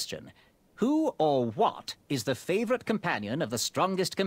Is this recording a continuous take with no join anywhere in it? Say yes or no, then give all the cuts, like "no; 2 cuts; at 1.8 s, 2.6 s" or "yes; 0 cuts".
yes; 0 cuts